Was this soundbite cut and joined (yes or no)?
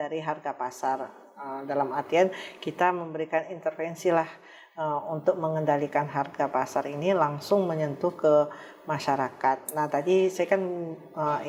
no